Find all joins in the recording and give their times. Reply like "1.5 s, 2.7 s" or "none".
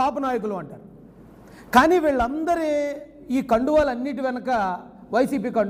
none